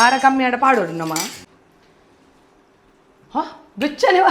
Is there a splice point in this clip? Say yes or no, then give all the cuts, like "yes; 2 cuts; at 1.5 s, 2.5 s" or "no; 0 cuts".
yes; 1 cut; at 1.5 s